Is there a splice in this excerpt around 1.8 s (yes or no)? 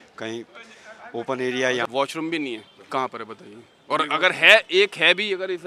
yes